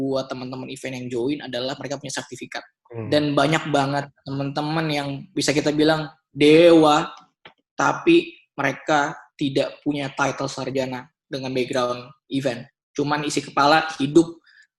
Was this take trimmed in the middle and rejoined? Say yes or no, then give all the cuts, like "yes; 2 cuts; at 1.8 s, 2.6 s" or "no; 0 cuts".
yes; 1 cut; at 2.8 s